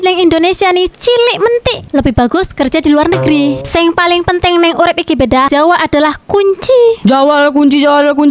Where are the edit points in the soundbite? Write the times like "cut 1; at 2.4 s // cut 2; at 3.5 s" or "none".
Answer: cut 1; at 3.6 s // cut 2; at 5.5 s // cut 3; at 7.0 s